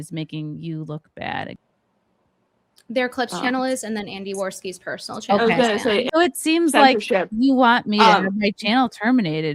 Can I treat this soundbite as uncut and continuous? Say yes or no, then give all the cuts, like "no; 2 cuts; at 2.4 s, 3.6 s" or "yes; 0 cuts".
no; 2 cuts; at 1.6 s, 6.1 s